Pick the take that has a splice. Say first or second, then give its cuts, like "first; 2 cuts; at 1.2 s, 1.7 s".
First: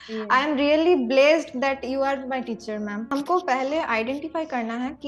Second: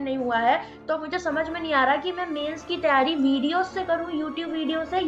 first; 1 cut; at 3.1 s